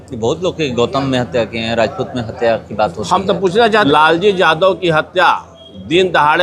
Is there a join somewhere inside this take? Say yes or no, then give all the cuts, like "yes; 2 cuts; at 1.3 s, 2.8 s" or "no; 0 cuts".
yes; 1 cut; at 3.8 s